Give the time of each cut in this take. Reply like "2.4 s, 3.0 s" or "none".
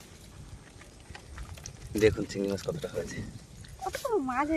0.9 s